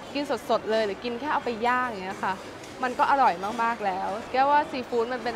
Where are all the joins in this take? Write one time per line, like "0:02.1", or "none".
0:04.2